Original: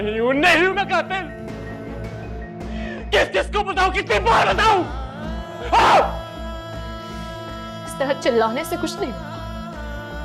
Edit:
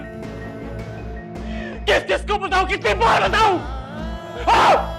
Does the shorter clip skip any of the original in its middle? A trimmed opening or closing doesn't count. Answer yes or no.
no